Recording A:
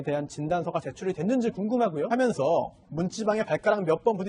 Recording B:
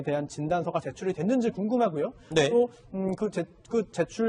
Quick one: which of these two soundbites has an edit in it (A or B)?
B